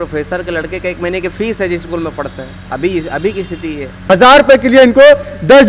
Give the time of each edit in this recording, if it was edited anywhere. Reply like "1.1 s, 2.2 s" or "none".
4.0 s